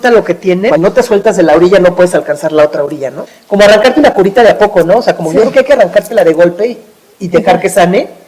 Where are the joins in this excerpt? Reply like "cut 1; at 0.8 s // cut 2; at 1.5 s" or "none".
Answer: cut 1; at 0.8 s // cut 2; at 3.3 s